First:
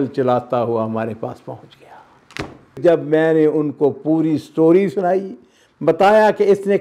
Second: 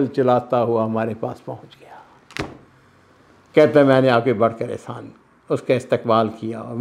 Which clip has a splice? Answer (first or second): first